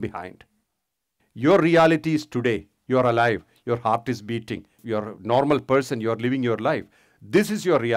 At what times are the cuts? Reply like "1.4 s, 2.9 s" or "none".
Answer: 4.8 s

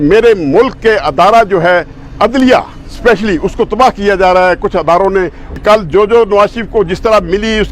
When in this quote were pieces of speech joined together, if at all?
5.4 s

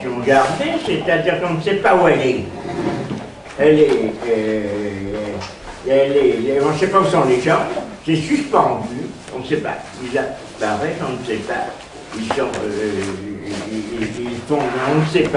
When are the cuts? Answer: none

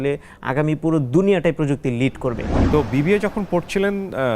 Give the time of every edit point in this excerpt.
2.5 s

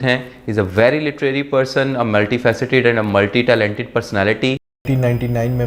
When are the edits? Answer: 4.7 s

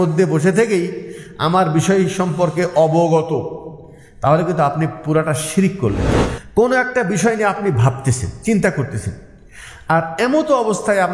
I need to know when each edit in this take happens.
6.0 s

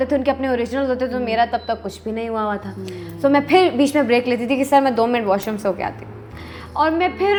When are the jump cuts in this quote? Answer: none

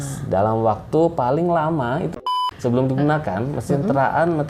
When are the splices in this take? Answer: 2.3 s

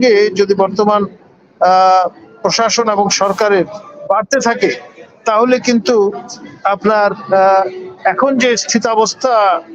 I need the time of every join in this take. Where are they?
none

